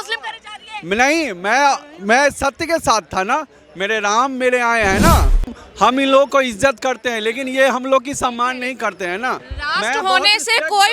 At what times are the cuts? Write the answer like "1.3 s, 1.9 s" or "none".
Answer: 5.6 s